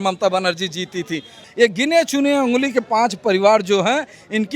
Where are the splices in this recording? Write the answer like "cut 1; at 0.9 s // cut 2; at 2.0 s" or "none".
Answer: cut 1; at 1.4 s